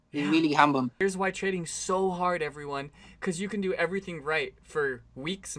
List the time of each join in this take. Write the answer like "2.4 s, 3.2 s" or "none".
0.9 s